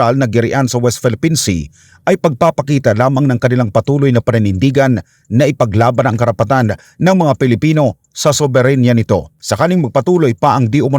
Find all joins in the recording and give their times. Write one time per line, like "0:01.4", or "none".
0:09.4